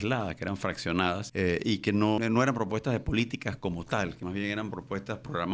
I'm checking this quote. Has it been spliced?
yes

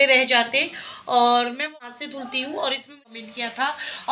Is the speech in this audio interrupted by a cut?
yes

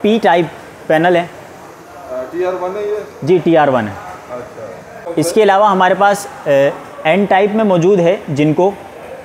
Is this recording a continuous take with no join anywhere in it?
no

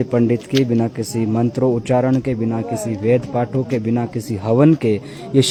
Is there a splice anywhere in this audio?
no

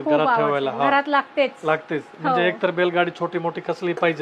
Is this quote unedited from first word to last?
yes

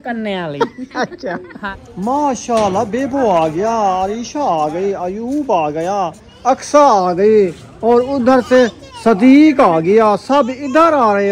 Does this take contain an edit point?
yes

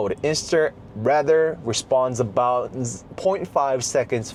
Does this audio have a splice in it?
no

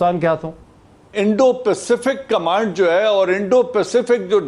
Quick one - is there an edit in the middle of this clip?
no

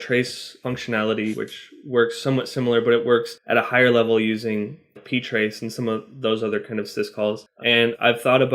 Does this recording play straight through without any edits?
no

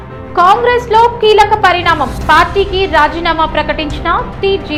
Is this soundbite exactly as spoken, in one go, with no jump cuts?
yes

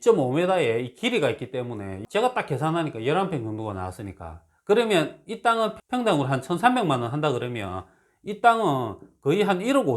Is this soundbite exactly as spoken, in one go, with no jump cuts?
no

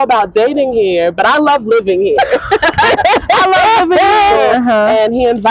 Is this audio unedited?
no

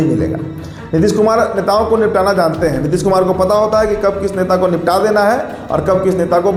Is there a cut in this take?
no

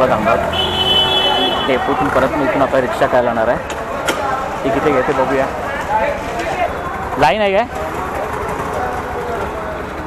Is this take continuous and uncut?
yes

